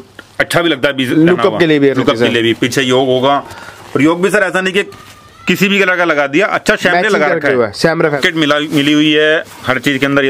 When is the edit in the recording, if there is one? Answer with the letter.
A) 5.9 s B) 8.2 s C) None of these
B